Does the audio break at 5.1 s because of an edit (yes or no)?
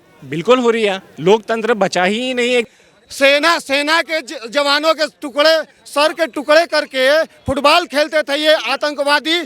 no